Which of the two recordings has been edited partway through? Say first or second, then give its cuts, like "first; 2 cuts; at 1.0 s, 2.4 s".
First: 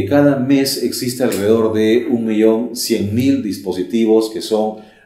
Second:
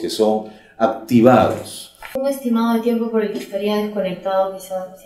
second; 1 cut; at 2.1 s